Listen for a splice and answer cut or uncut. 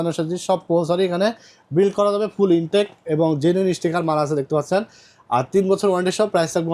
uncut